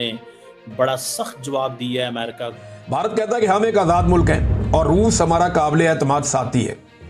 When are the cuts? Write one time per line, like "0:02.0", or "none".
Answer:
0:02.5